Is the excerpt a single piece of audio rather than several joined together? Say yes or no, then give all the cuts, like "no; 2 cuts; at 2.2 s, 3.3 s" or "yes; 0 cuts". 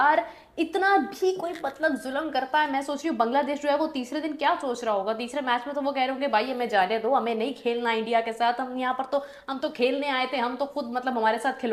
yes; 0 cuts